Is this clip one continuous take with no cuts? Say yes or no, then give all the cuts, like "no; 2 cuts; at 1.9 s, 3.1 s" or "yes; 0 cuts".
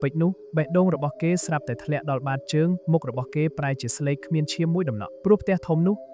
no; 1 cut; at 5.1 s